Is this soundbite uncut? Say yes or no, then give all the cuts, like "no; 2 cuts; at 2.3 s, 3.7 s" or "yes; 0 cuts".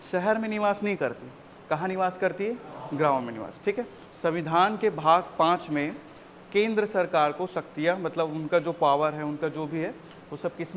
no; 1 cut; at 4.0 s